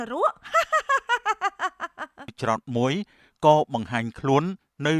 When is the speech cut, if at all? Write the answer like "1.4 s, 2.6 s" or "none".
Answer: 2.3 s